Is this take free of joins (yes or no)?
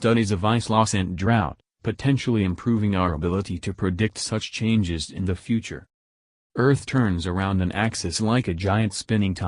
no